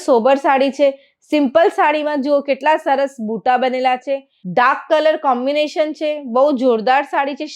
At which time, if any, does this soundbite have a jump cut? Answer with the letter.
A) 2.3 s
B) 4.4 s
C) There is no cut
B